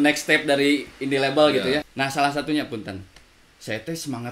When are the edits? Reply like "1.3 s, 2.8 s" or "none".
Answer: 1.9 s